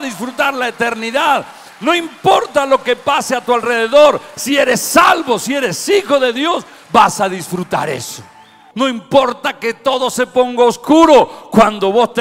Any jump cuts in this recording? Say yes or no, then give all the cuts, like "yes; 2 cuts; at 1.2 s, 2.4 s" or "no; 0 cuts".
yes; 1 cut; at 8.6 s